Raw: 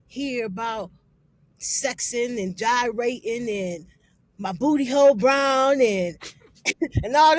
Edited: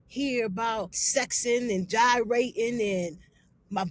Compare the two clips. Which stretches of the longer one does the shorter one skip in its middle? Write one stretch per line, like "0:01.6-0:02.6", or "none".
0:01.0-0:01.7